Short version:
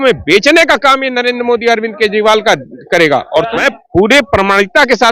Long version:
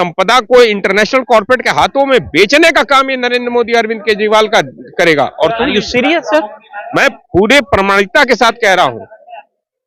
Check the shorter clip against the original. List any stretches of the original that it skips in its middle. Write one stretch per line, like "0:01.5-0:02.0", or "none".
0:05.6-0:06.9

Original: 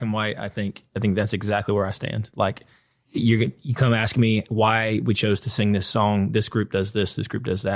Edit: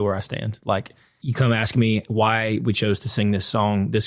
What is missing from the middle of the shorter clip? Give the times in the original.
0:02.9-0:03.6

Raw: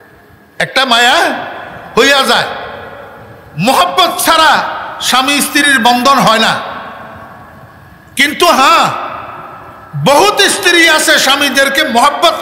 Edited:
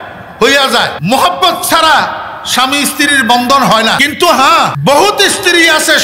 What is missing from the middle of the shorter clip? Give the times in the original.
0:02.5-0:03.5
0:06.5-0:08.2
0:09.0-0:10.0

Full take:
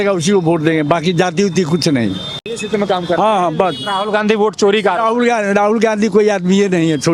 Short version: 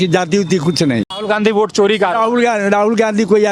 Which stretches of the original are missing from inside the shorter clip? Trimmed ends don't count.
0:02.2-0:04.0

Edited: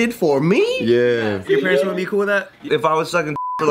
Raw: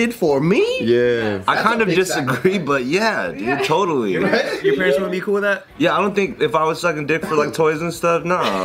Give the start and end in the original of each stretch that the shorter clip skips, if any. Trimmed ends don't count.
0:01.4-0:04.5
0:05.8-0:06.3

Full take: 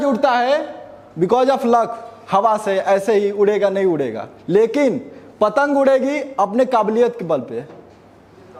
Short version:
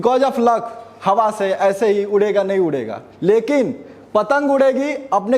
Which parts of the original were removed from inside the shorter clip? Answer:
none

